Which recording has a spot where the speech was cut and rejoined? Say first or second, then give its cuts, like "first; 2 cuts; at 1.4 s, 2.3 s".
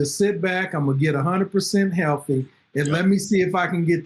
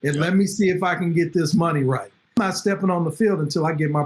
second; 1 cut; at 2.4 s